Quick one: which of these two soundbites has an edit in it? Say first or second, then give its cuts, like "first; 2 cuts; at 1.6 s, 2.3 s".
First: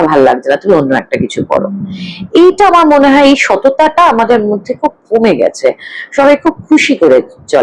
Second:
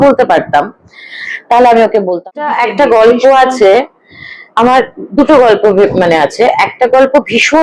second; 1 cut; at 2.2 s